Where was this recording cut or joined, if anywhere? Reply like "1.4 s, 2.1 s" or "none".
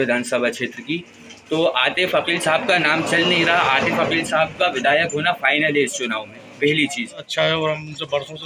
7.3 s

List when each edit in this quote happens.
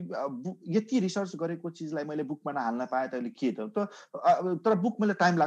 none

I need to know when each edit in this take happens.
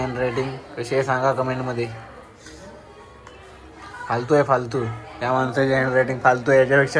none

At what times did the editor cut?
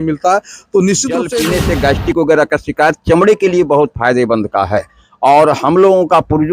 1.3 s

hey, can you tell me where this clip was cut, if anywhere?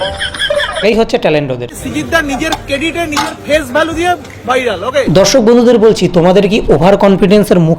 0.8 s, 1.7 s

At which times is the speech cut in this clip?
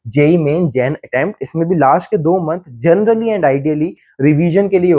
none

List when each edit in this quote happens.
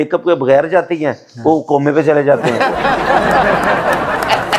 none

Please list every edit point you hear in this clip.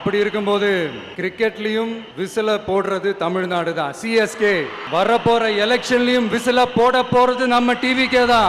1.0 s, 2.1 s, 4.8 s

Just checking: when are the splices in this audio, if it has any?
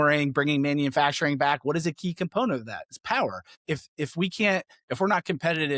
3.5 s

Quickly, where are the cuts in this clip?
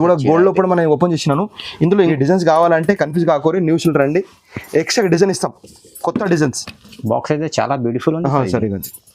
2.1 s

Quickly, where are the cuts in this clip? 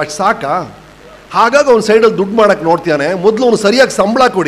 none

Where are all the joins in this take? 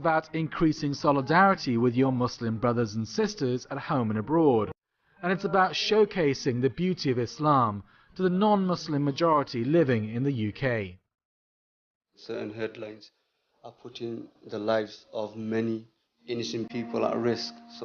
none

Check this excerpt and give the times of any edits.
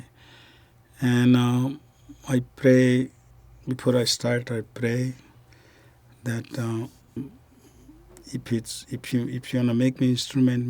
7.2 s

